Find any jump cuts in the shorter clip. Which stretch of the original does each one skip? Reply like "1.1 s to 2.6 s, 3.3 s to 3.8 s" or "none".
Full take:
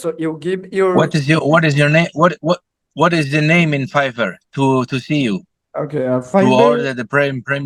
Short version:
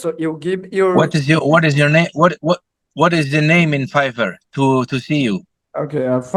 none